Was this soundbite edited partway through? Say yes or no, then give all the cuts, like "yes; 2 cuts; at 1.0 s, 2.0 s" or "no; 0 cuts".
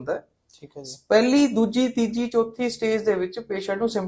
no; 0 cuts